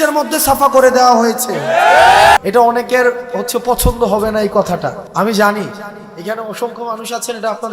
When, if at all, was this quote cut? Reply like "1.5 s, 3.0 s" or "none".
2.4 s, 5.0 s